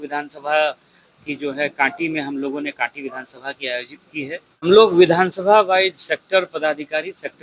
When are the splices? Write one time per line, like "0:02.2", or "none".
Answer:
0:04.7